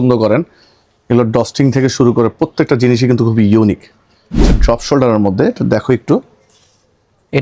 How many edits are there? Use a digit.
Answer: 1